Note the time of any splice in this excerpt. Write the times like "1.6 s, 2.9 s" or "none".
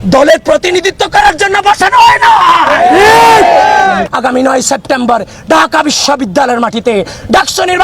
4.1 s